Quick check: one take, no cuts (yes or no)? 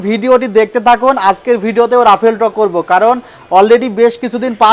yes